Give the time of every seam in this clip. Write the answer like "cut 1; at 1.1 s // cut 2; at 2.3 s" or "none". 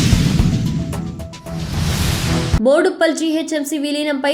cut 1; at 2.6 s